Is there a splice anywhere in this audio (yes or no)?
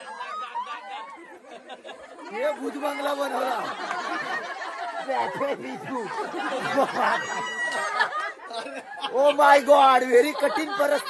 no